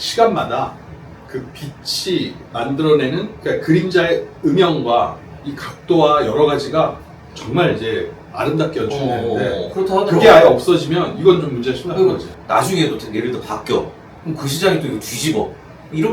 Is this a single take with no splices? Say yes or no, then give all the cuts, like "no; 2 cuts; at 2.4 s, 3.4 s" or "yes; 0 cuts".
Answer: no; 1 cut; at 12.4 s